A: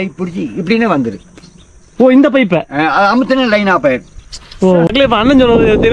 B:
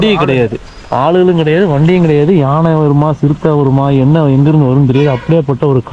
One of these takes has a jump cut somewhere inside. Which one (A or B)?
A